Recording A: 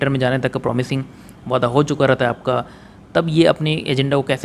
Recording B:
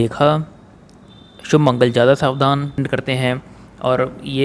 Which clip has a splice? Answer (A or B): B